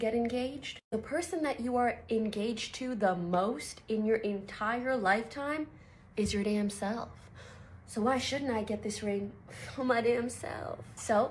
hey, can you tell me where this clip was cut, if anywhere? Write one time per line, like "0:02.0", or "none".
0:01.3